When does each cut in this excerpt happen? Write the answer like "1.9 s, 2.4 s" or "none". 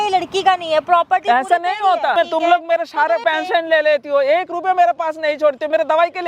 2.1 s, 3.2 s